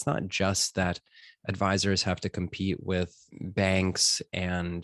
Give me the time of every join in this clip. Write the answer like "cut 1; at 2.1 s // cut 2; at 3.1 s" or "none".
cut 1; at 3.2 s